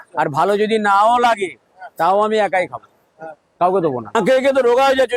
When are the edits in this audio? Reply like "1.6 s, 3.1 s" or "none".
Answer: 4.1 s

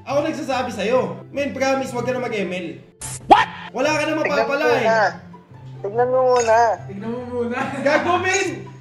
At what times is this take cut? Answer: none

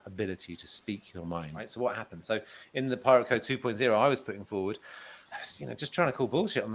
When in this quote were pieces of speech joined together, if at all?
1.6 s

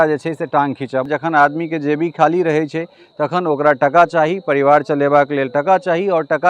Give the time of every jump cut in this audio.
1.1 s

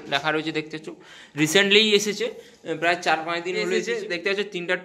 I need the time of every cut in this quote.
3.8 s

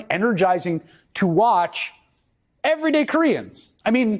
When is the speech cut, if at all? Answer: none

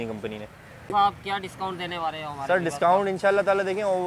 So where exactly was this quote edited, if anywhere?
0.9 s

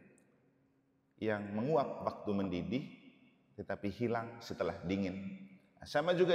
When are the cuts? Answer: none

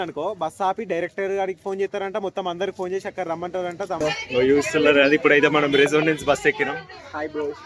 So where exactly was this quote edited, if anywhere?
4.0 s

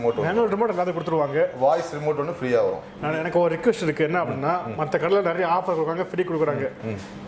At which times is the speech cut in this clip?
2.9 s

